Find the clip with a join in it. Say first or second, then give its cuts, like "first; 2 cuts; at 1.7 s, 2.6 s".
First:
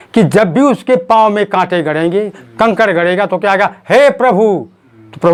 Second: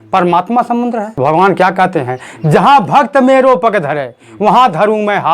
second; 1 cut; at 1.1 s